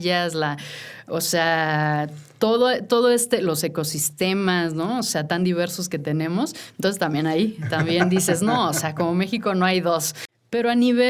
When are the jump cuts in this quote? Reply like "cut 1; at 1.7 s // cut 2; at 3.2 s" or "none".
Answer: cut 1; at 10.2 s

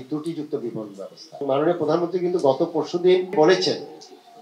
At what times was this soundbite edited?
cut 1; at 1.4 s // cut 2; at 3.3 s

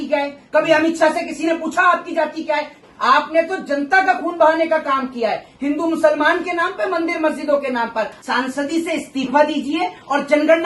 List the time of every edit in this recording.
cut 1; at 2.8 s // cut 2; at 8.2 s

